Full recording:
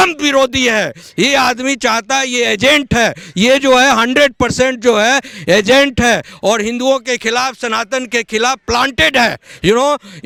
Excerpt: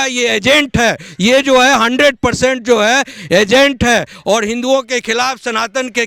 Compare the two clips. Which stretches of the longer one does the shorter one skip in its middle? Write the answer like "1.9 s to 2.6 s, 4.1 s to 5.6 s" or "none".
none